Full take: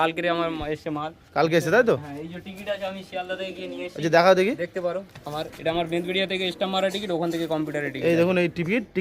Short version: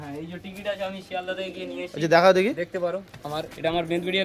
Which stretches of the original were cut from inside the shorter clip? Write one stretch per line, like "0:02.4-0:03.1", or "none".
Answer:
none